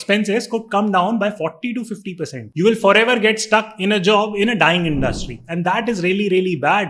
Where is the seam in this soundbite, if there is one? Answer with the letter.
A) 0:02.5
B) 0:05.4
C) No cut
A